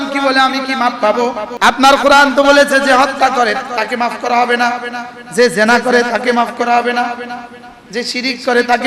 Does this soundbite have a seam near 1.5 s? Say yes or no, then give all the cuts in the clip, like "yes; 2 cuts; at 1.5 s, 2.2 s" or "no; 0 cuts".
yes; 1 cut; at 1.5 s